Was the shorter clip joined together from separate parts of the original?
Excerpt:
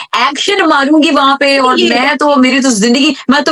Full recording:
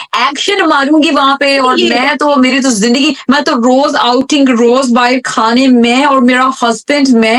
no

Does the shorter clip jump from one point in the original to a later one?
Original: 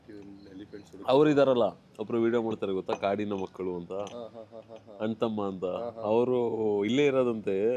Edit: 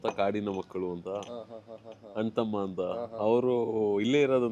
no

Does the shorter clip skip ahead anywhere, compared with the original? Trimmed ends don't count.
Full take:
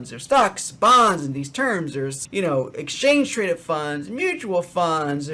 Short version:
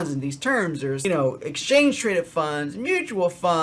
yes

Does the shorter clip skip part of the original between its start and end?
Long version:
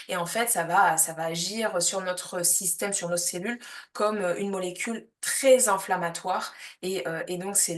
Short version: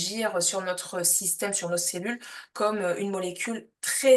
no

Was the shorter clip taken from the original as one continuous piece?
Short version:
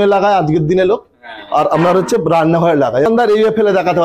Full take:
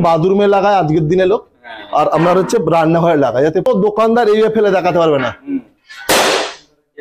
no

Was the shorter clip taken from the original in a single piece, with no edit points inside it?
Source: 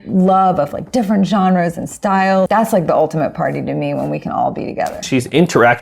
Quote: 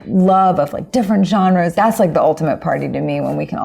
no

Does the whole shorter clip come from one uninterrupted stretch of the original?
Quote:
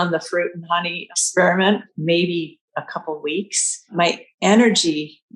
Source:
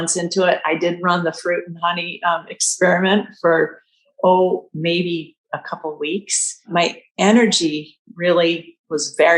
no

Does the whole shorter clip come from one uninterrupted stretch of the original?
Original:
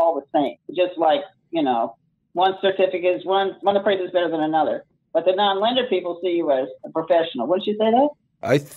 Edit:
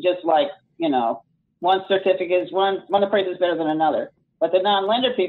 yes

